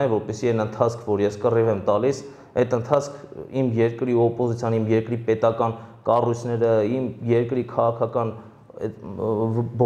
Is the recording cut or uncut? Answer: uncut